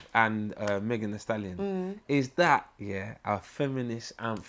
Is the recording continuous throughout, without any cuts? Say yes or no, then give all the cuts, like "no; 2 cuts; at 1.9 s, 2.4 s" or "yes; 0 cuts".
yes; 0 cuts